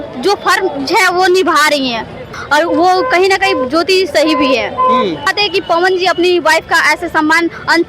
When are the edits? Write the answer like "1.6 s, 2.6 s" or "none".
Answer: 2.4 s, 5.3 s

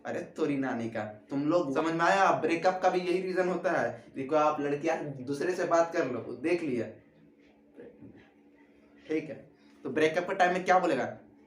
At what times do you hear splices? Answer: 1.7 s

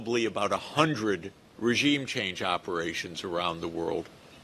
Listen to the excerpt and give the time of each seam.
none

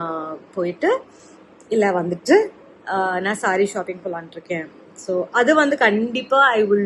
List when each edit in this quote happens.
none

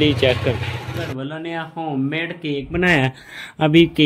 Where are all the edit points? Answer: 1.0 s

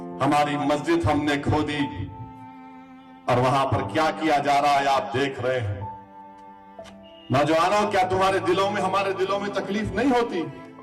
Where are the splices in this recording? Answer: 5.7 s

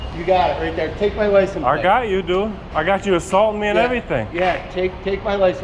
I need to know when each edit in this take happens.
none

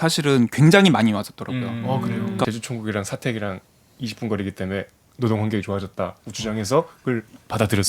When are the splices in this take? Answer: 2.5 s

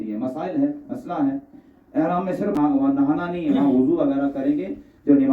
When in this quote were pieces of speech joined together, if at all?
2.6 s

